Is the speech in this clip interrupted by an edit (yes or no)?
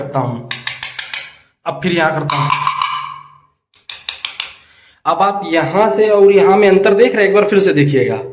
no